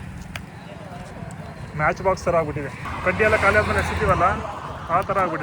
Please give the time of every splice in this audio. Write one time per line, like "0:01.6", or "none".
0:02.8